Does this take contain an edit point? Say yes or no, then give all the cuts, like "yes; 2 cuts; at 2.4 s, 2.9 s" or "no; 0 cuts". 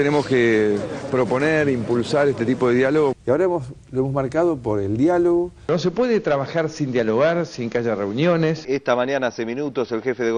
yes; 3 cuts; at 3.1 s, 5.7 s, 8.6 s